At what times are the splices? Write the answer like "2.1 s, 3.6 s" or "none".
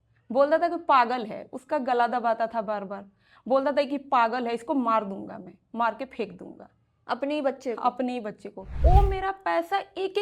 8.7 s